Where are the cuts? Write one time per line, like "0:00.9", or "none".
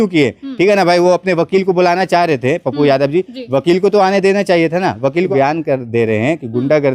0:05.3